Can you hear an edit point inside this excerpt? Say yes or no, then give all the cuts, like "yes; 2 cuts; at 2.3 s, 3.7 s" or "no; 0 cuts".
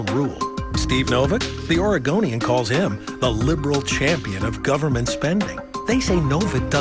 no; 0 cuts